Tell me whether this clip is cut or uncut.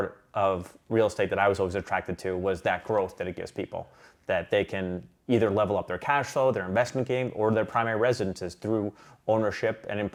uncut